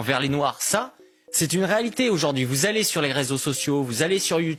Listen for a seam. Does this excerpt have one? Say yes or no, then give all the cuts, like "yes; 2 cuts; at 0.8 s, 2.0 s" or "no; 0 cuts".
no; 0 cuts